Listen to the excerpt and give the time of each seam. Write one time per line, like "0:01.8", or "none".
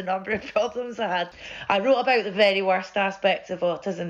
0:01.4